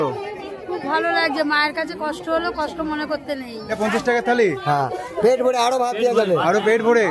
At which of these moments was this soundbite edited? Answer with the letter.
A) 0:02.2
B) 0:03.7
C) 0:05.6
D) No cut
B